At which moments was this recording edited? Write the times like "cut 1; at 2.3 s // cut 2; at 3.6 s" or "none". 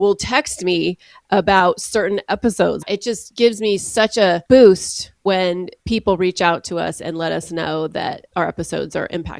cut 1; at 2.8 s // cut 2; at 4.4 s // cut 3; at 5.7 s // cut 4; at 8.2 s